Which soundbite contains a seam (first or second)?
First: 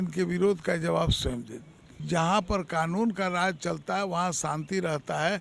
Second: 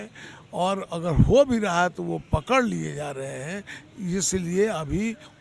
first